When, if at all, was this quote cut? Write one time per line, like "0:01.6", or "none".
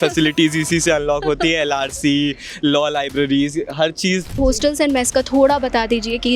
0:04.4